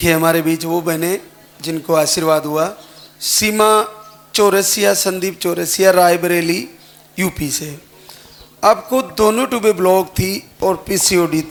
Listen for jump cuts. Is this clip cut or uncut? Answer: uncut